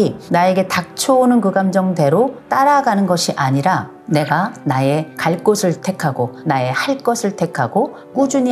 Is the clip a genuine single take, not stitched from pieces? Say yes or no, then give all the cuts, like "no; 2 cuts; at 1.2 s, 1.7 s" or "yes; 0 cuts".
yes; 0 cuts